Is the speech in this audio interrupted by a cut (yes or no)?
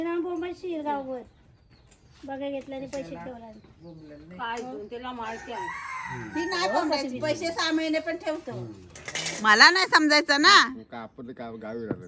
yes